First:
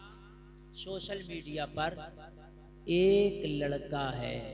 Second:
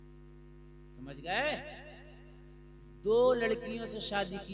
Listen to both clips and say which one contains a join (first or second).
second